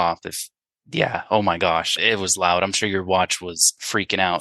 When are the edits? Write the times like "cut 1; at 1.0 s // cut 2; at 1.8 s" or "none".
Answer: cut 1; at 1.9 s